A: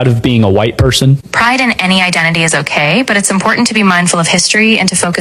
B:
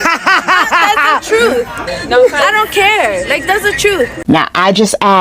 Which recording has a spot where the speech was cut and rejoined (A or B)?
B